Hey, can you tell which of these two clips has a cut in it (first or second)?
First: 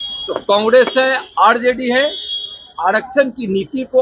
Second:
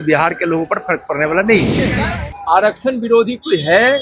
second